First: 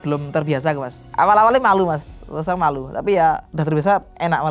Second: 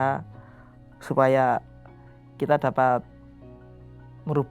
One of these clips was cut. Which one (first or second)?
first